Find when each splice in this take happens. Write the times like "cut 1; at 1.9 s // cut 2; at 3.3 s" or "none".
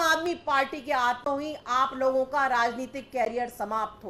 none

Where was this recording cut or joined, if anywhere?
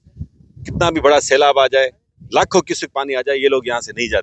none

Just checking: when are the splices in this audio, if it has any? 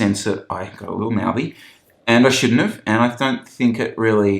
cut 1; at 1.9 s

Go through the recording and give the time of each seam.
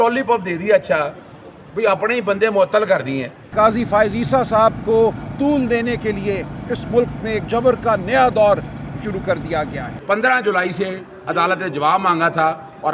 cut 1; at 3.4 s // cut 2; at 10.0 s

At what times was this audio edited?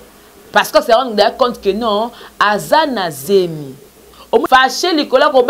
cut 1; at 4.4 s

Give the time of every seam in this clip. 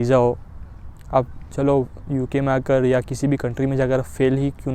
none

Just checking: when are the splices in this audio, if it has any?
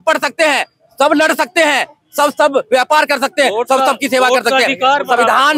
none

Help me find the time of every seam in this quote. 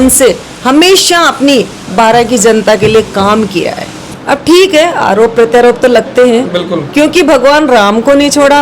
cut 1; at 4.0 s

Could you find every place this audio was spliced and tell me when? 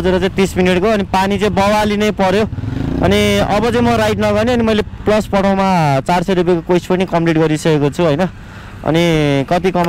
none

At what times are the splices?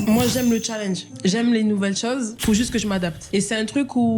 cut 1; at 1.1 s // cut 2; at 2.4 s // cut 3; at 3.2 s

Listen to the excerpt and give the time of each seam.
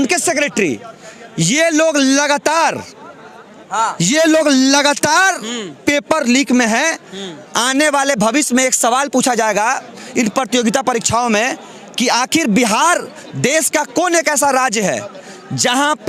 none

